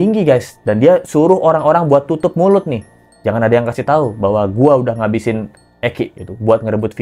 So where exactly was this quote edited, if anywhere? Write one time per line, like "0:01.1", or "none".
none